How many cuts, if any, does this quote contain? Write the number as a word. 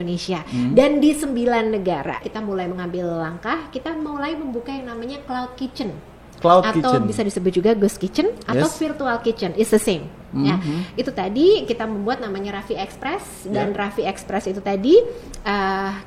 one